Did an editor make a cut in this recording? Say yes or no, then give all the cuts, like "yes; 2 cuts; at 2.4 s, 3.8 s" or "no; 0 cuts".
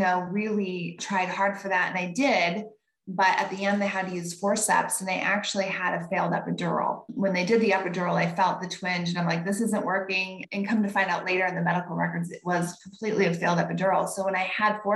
no; 0 cuts